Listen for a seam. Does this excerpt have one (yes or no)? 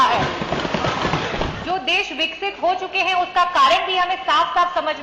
yes